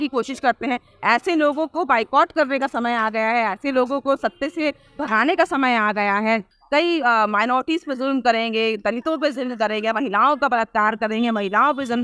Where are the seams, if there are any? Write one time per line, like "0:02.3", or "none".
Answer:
0:06.5